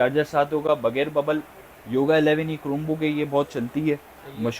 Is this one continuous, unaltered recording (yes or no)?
yes